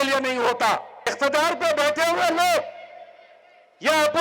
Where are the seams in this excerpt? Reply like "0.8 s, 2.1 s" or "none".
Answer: 1.0 s